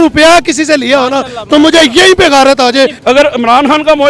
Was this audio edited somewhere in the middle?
yes; 1 cut; at 3.0 s

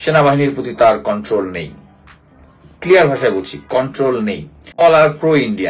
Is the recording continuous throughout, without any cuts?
no; 1 cut; at 4.7 s

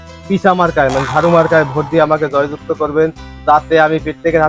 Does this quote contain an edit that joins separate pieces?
no; 0 cuts

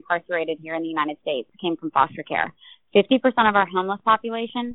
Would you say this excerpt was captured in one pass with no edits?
yes; 0 cuts

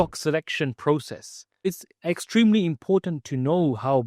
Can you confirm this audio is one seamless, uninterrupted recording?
no; 1 cut; at 1.8 s

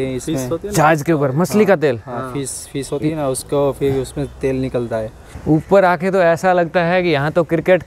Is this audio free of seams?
no; 1 cut; at 5.2 s

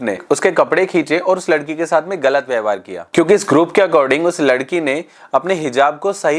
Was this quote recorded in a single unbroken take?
yes; 0 cuts

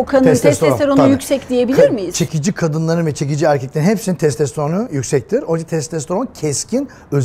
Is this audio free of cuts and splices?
yes; 0 cuts

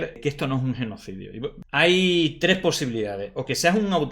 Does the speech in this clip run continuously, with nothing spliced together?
no; 1 cut; at 1.6 s

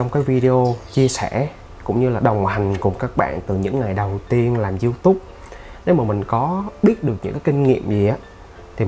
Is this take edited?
no; 0 cuts

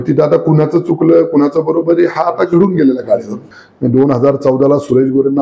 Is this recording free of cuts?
no; 1 cut; at 3.4 s

